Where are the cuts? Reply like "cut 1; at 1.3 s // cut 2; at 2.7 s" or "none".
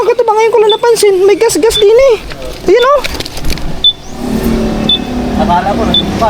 none